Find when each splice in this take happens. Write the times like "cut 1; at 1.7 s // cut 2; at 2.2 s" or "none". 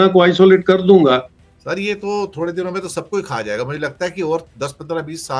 cut 1; at 1.3 s